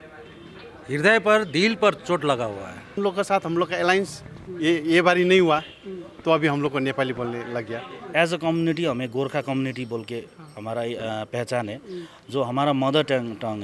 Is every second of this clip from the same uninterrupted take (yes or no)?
no